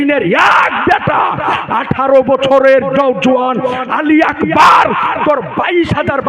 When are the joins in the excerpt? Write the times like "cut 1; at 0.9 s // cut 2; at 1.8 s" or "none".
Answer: none

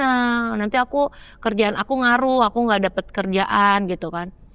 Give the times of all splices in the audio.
none

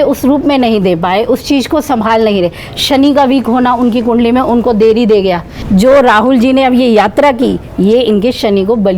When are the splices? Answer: cut 1; at 5.5 s

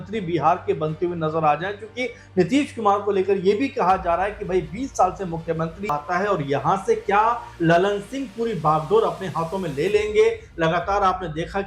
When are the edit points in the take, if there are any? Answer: cut 1; at 5.9 s

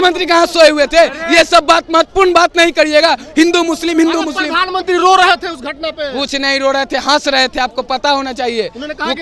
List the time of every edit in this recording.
none

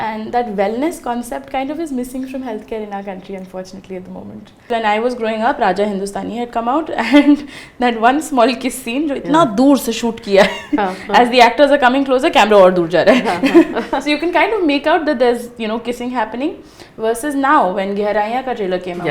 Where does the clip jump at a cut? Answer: cut 1; at 4.7 s

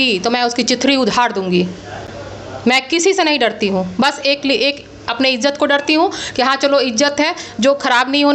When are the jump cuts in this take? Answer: none

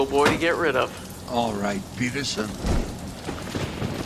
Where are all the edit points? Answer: none

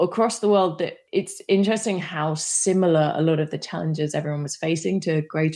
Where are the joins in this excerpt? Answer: cut 1; at 1.0 s

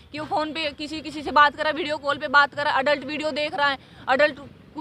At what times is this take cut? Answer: none

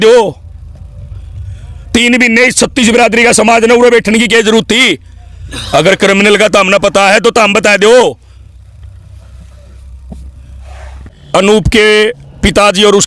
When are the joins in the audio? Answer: cut 1; at 11.1 s

